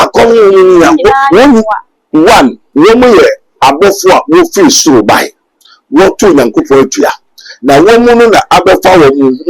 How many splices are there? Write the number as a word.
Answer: one